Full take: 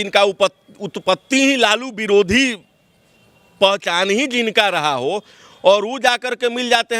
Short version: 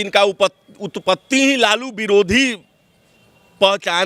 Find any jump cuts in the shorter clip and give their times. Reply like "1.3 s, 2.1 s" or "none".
none

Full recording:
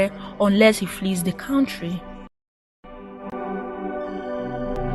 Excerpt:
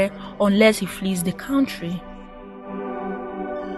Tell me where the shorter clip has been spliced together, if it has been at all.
2.8 s

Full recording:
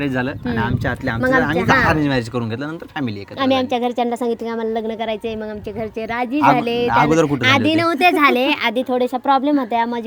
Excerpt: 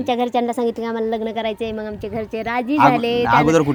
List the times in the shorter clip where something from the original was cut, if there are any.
none

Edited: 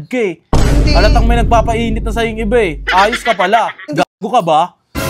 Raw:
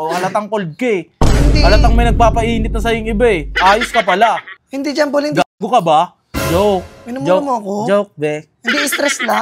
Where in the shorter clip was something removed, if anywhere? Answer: 3.9 s

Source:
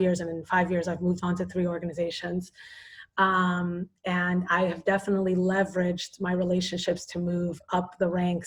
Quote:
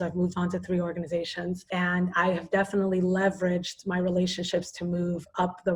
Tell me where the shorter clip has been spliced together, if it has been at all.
1.6 s

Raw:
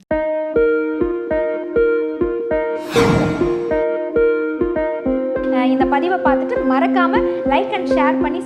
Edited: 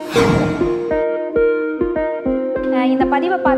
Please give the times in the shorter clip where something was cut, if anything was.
none

